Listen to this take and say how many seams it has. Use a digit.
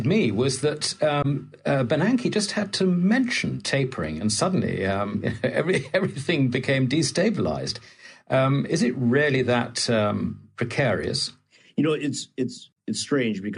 1